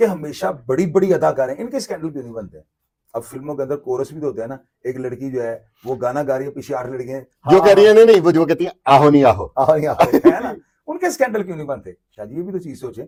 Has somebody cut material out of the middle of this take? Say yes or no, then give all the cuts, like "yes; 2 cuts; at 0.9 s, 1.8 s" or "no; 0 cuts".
no; 0 cuts